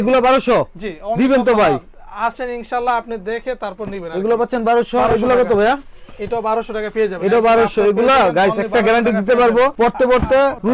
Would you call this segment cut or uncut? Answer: uncut